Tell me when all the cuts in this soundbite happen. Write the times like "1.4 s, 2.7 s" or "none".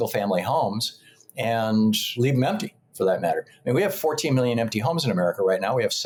none